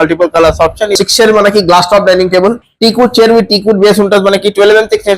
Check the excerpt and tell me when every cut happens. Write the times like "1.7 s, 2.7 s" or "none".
0.9 s